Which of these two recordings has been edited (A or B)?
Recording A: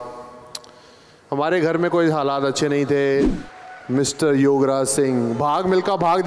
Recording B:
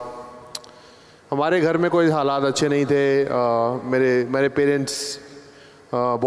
A